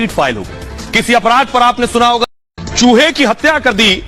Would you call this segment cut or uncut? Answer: cut